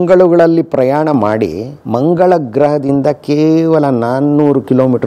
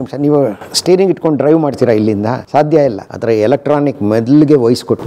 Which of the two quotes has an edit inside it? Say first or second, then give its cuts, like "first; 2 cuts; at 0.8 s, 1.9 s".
second; 2 cuts; at 2.4 s, 3.1 s